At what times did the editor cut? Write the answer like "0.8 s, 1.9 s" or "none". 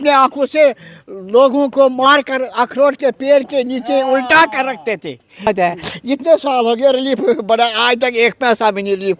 5.5 s